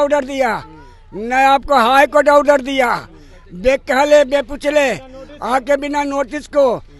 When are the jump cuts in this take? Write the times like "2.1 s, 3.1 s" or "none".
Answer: none